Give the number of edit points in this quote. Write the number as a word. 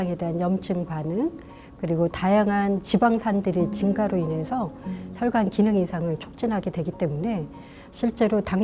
zero